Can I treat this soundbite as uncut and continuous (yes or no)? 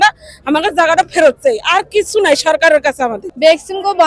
yes